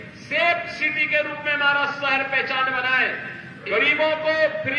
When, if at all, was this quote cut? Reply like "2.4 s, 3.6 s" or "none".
3.7 s